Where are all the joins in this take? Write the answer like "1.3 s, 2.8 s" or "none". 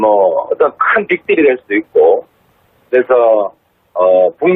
none